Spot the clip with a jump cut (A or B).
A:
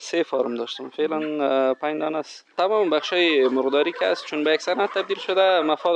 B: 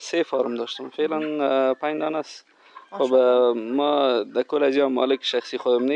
A